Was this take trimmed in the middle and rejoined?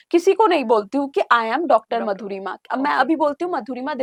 no; 0 cuts

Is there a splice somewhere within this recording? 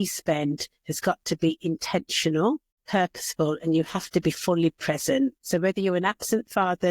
yes; 2 cuts; at 2.7 s, 5.4 s

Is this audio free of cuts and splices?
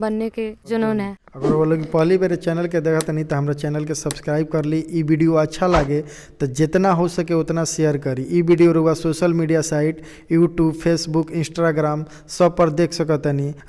yes; 0 cuts

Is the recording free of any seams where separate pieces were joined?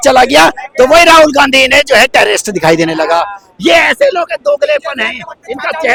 yes; 0 cuts

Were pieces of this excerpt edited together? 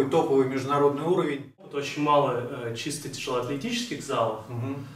yes; 1 cut; at 1.8 s

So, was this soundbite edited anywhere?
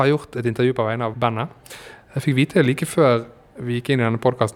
yes; 1 cut; at 1.1 s

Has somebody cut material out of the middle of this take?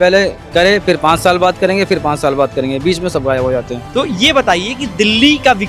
yes; 1 cut; at 3.8 s

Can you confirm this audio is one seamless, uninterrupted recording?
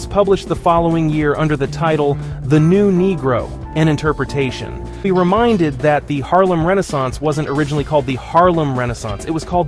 no; 1 cut; at 5.0 s

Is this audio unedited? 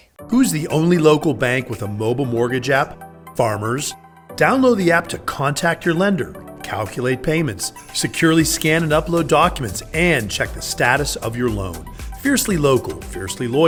yes; 0 cuts

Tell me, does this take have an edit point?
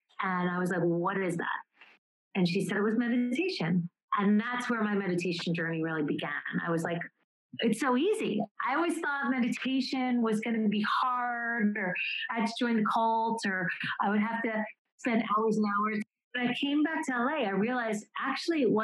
yes; 2 cuts; at 14.9 s, 16.2 s

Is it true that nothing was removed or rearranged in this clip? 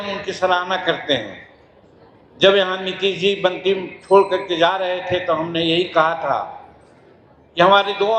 yes; 0 cuts

